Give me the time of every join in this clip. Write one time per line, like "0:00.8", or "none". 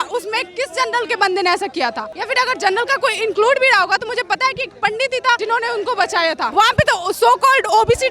0:02.1
0:05.4
0:06.5